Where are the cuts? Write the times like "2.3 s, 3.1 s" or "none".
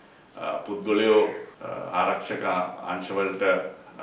1.5 s